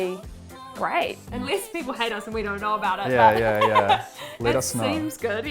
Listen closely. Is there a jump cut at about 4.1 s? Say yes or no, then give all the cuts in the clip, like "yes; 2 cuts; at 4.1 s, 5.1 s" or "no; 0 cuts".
no; 1 cut; at 1.2 s